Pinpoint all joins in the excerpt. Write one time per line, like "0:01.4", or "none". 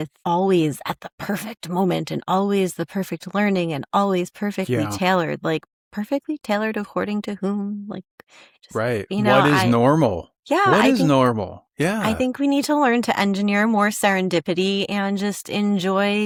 none